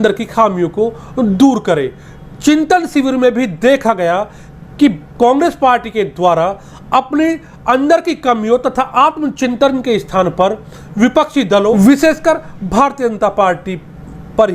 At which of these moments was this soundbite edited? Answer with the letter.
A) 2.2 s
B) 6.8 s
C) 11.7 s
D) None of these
C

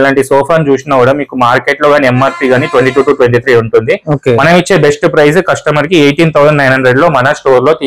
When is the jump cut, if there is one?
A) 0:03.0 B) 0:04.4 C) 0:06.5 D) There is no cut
D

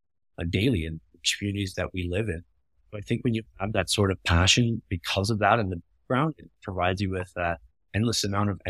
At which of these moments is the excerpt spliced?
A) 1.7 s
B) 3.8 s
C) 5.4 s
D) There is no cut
A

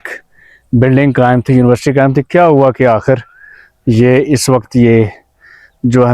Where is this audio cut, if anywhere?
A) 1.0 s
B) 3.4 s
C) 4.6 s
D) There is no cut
D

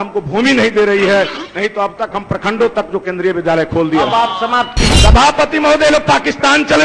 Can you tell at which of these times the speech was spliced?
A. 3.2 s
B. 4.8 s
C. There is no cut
B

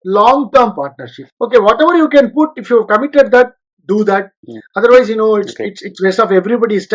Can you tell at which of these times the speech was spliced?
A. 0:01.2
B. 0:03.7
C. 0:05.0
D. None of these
A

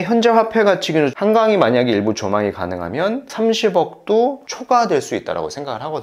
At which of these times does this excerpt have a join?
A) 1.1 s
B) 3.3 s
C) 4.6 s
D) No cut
A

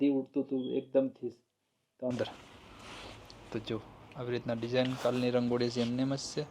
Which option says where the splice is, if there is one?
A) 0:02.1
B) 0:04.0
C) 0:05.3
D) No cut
A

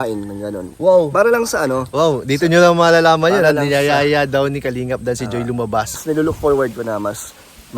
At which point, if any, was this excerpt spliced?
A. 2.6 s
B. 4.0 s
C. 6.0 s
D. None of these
C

